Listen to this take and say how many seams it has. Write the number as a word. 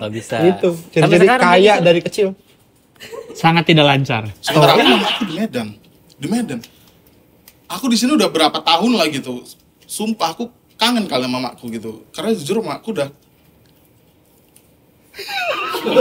one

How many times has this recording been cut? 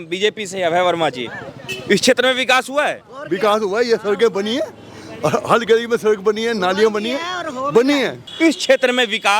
one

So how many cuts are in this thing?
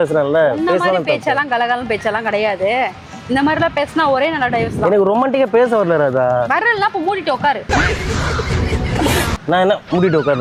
zero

